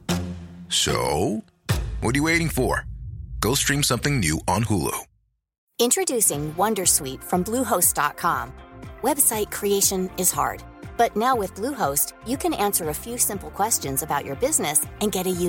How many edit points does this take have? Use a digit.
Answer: 1